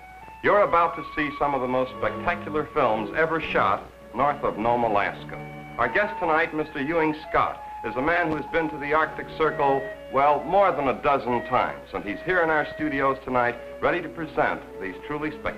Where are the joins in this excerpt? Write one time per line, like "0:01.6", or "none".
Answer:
0:06.0